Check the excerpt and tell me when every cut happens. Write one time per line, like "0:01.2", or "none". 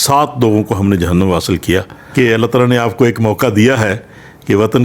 0:02.0